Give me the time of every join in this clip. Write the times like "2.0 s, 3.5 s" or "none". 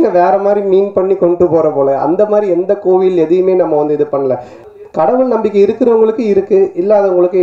4.6 s